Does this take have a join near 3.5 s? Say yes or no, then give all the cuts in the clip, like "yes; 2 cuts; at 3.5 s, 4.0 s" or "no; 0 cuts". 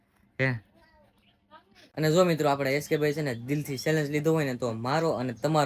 no; 1 cut; at 1.8 s